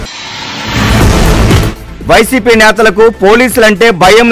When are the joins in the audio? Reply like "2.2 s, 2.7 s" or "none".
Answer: 1.0 s